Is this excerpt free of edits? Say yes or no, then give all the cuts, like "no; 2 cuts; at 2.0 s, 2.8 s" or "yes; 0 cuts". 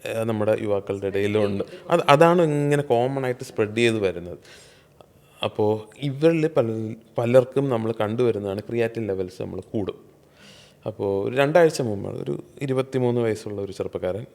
yes; 0 cuts